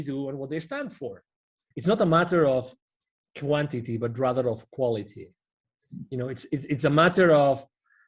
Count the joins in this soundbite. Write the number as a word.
one